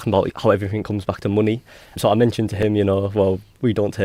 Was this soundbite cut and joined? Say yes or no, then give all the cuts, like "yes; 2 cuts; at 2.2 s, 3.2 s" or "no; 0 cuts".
no; 0 cuts